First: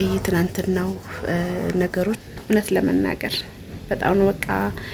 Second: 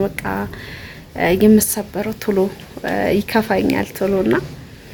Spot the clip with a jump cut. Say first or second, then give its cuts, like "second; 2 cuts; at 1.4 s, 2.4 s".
first; 1 cut; at 2.3 s